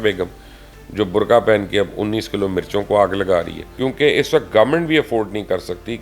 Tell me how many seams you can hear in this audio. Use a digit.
1